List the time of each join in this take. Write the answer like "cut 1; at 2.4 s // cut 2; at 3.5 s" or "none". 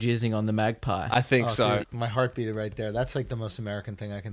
cut 1; at 1.8 s